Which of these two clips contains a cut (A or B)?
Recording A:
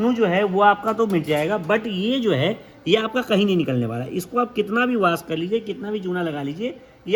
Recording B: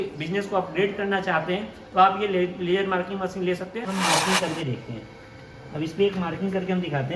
B